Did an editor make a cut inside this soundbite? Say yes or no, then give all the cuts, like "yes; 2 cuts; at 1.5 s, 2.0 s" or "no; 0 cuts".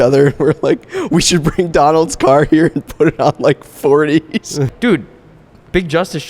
yes; 1 cut; at 4.7 s